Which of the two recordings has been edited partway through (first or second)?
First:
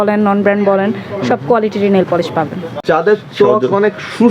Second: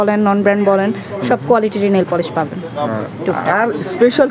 first